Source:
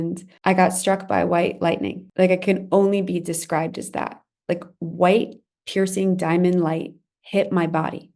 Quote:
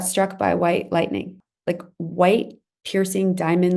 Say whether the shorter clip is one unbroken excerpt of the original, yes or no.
no